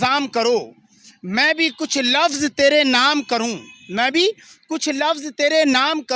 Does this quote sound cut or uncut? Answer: uncut